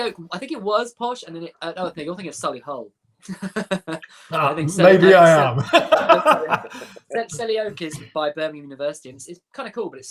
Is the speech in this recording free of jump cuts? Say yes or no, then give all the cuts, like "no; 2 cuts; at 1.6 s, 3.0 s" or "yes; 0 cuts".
yes; 0 cuts